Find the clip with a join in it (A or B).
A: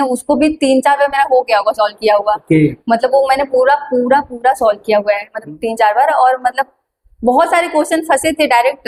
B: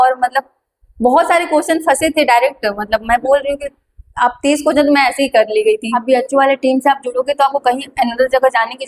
B